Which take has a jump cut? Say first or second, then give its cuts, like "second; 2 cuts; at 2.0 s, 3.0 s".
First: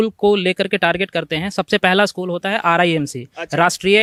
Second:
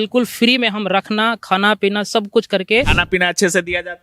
second; 1 cut; at 3.0 s